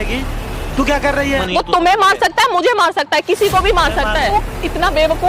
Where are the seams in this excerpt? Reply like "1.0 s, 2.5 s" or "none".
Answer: 1.4 s, 4.2 s